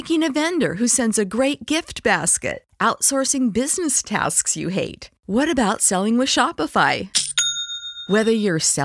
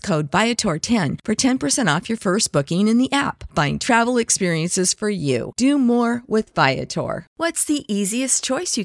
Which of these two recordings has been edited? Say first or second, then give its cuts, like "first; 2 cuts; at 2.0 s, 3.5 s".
second; 1 cut; at 7.3 s